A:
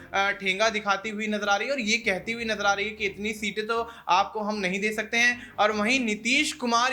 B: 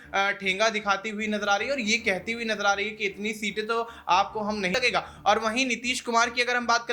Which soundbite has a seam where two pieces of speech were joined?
B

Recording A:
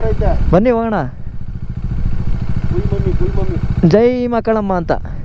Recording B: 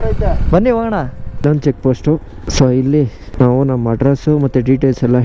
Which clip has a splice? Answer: B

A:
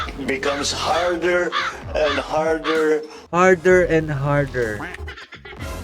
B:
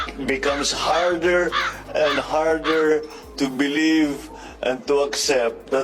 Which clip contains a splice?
A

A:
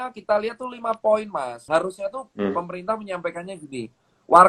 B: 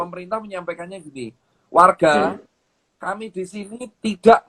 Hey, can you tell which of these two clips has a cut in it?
A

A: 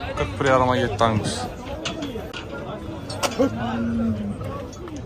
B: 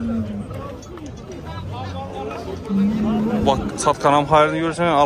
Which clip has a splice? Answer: A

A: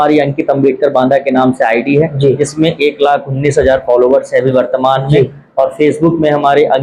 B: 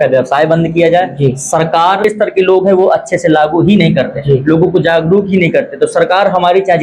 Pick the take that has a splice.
B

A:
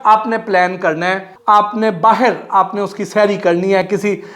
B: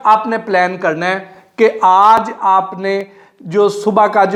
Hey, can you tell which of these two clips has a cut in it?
A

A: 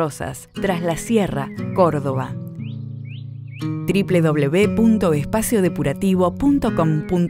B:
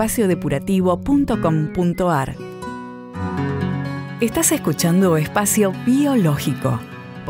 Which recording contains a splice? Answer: B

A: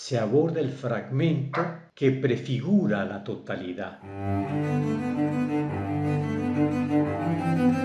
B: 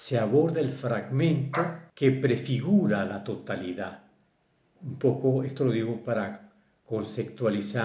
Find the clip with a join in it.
A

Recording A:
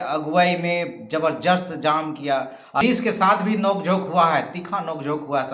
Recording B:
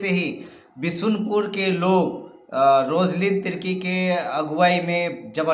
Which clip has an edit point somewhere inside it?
A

